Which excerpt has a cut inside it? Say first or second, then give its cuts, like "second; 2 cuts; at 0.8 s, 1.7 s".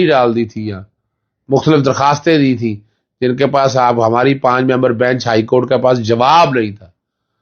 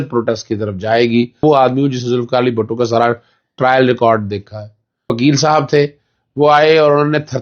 second; 2 cuts; at 1.4 s, 5.1 s